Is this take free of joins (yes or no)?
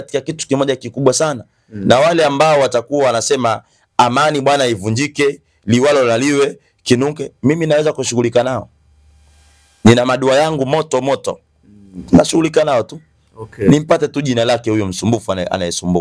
yes